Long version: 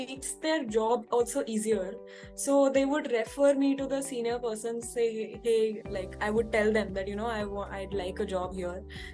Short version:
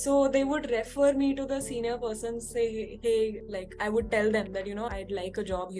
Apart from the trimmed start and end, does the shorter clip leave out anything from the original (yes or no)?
yes